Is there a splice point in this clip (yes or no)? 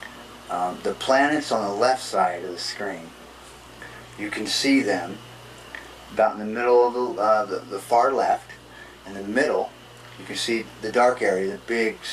yes